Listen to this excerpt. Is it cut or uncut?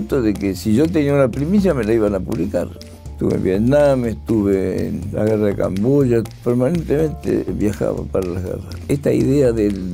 cut